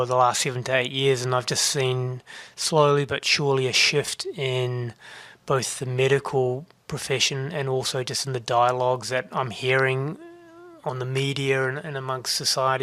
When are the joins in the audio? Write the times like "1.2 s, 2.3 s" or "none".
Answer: none